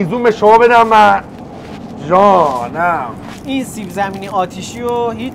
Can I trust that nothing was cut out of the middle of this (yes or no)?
yes